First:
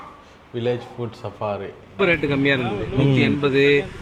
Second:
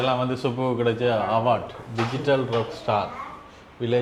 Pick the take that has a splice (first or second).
first